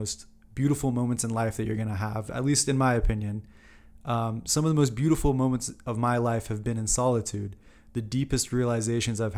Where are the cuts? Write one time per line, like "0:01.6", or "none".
none